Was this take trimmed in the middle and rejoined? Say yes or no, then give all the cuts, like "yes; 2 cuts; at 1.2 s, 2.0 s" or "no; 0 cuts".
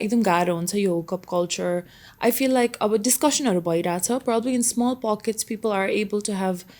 no; 0 cuts